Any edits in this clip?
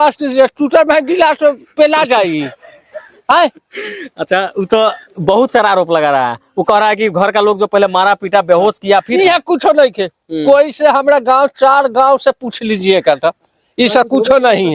no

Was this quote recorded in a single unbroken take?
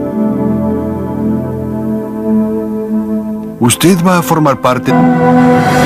yes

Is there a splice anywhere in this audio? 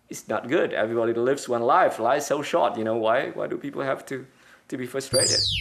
no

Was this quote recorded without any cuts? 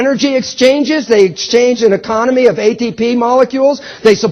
no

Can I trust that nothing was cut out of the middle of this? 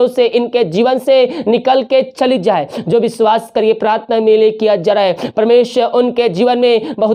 yes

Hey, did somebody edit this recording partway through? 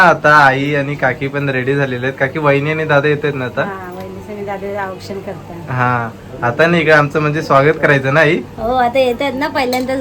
no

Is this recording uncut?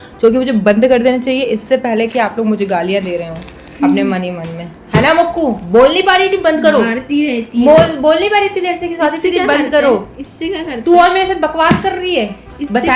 yes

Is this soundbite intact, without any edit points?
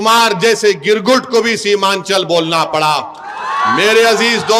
yes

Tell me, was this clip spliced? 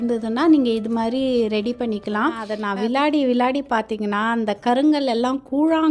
yes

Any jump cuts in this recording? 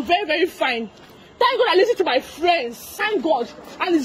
yes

